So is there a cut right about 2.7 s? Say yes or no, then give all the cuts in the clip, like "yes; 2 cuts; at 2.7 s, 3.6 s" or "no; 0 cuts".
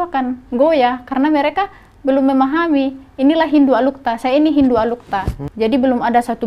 no; 1 cut; at 5.4 s